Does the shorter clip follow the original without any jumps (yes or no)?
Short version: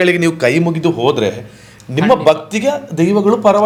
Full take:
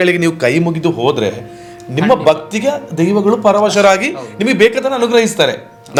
yes